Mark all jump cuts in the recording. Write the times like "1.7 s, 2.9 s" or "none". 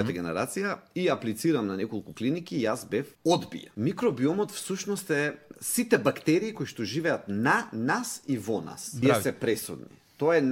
3.6 s, 9.0 s